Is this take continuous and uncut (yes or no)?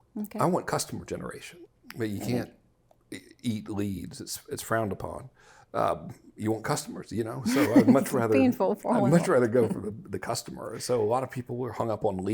no